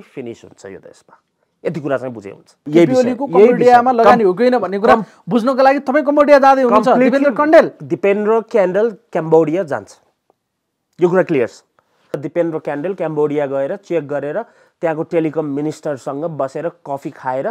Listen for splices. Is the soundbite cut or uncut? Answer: cut